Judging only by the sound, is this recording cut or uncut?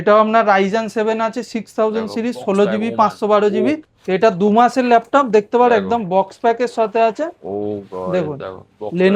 cut